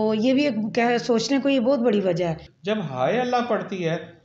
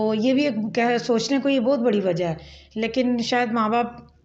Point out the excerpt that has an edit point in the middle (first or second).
first